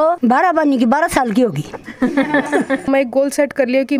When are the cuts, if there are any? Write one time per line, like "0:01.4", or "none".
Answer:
0:02.9

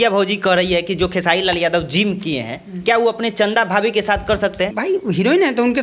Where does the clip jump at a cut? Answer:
0:04.7

